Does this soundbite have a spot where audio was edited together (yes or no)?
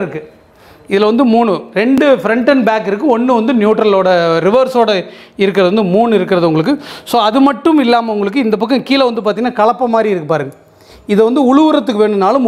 no